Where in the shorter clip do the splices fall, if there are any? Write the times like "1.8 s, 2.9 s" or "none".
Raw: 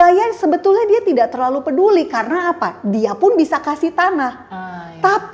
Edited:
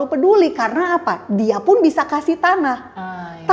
none

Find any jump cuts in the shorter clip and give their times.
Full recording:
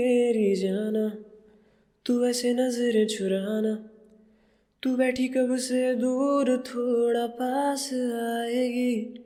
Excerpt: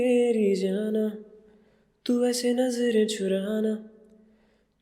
none

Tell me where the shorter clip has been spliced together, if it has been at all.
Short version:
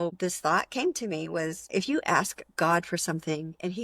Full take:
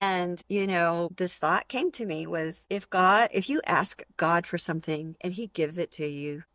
1.7 s

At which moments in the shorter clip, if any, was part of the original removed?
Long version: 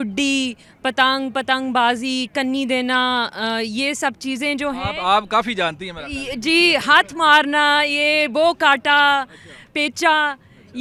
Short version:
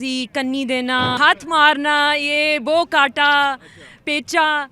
1.2 s

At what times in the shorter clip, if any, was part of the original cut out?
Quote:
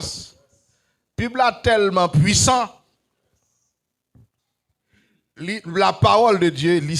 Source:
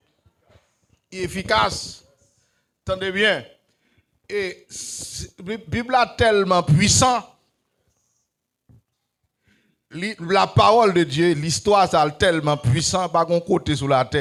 1.1 s

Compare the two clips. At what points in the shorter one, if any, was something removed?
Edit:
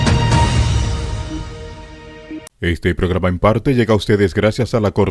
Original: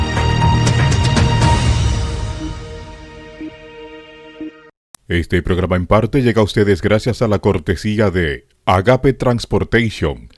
2.5 s

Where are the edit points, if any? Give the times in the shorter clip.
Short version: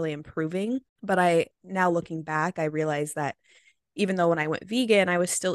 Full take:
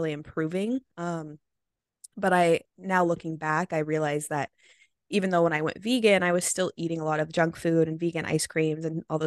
0.9 s

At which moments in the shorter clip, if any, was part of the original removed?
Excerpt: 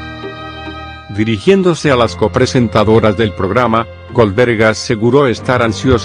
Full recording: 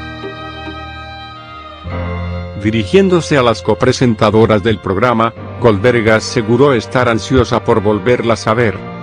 1.1 s

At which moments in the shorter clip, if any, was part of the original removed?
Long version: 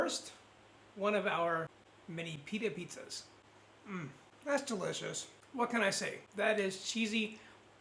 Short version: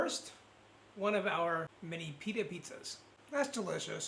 1.8 s, 3.1 s

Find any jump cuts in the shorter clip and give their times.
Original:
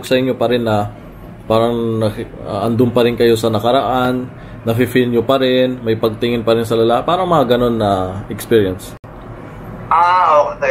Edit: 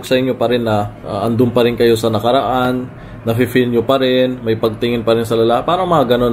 1.0 s

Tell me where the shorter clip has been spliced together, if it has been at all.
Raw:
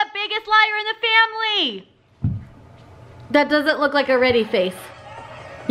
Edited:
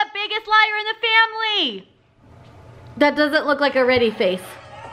2.1 s

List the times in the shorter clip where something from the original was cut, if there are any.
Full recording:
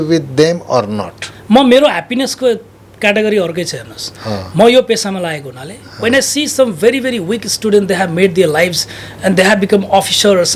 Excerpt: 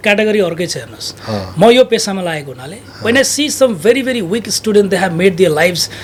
none

